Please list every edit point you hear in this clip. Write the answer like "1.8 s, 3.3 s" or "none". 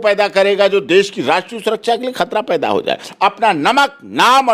3.1 s

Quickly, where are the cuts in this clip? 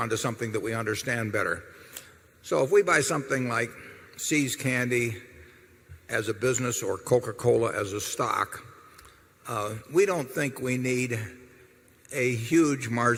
none

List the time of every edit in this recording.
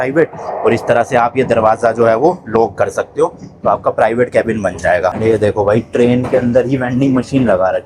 5.2 s

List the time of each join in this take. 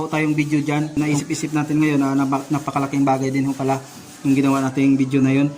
1.0 s

